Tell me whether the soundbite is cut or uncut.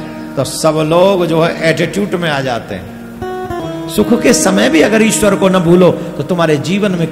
cut